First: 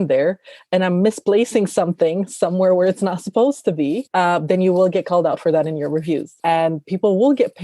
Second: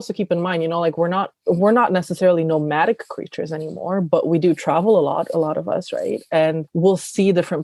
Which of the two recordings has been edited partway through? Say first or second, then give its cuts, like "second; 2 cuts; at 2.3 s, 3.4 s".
first; 1 cut; at 6.4 s